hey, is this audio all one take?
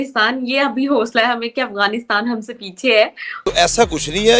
no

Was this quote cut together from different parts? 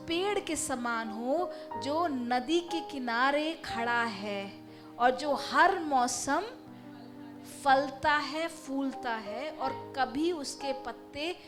no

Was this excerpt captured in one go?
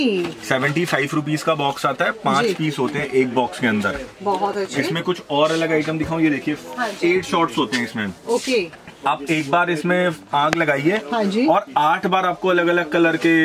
yes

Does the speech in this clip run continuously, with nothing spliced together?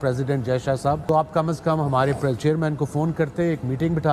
no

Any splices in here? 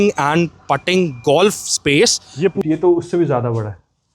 yes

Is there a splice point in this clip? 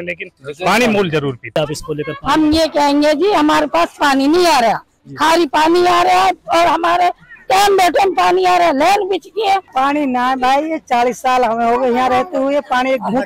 yes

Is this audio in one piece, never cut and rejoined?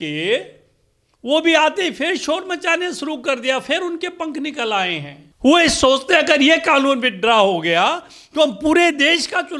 yes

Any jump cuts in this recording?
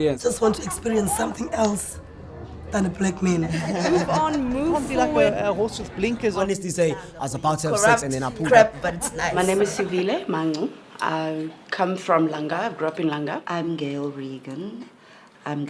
no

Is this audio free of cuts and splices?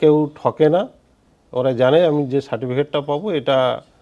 yes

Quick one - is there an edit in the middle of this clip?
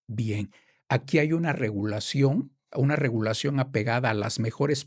no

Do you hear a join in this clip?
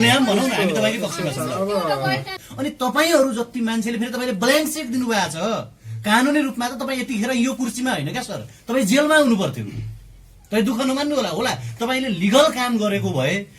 yes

